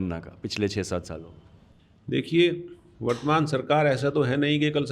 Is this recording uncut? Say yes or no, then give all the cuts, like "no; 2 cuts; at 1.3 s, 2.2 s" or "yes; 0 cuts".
yes; 0 cuts